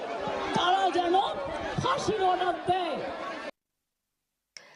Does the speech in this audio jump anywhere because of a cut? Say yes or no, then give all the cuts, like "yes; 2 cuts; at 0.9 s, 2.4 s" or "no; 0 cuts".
yes; 1 cut; at 2.4 s